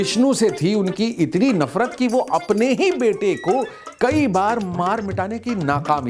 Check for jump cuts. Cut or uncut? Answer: uncut